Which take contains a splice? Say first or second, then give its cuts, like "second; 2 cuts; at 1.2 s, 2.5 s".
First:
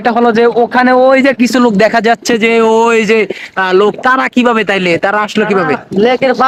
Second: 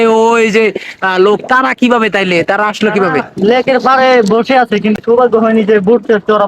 second; 1 cut; at 5.0 s